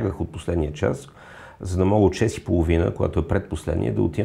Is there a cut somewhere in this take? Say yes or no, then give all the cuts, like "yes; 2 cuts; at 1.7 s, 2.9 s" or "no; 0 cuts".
no; 0 cuts